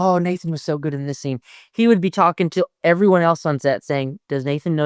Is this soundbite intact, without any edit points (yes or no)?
yes